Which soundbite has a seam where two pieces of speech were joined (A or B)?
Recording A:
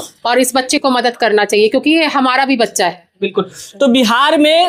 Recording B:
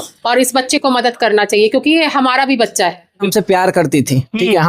B